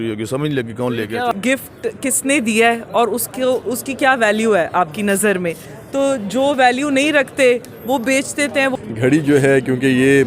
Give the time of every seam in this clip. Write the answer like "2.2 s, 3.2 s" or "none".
1.3 s, 8.7 s